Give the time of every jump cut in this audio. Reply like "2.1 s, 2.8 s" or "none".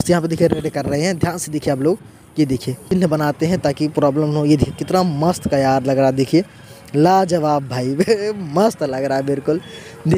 2.8 s